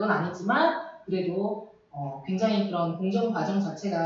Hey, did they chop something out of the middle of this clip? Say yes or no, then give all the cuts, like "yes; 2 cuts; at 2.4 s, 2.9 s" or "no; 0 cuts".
no; 0 cuts